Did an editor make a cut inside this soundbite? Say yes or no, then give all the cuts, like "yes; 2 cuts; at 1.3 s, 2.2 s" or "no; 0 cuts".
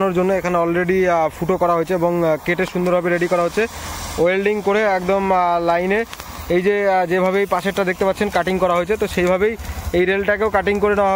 no; 0 cuts